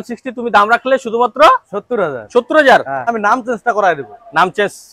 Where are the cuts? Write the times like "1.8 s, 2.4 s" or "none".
3.1 s